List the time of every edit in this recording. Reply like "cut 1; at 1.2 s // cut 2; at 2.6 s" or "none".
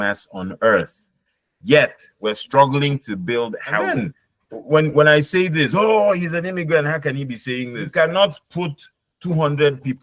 cut 1; at 3.9 s // cut 2; at 7.8 s

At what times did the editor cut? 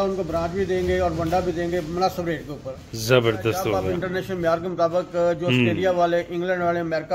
cut 1; at 3.9 s

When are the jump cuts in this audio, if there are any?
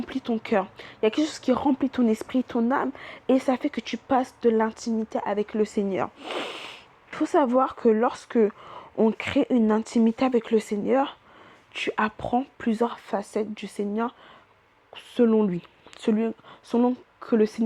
cut 1; at 7.2 s

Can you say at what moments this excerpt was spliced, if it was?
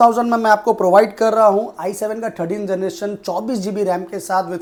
none

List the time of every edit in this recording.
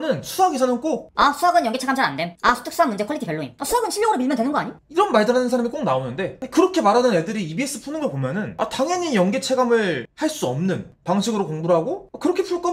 none

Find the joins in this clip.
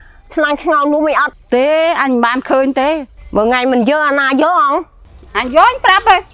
cut 1; at 1.4 s // cut 2; at 3.1 s

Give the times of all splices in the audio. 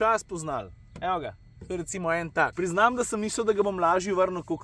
cut 1; at 2.5 s

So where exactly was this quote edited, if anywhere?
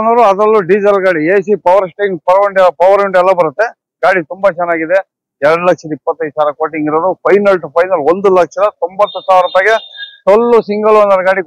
none

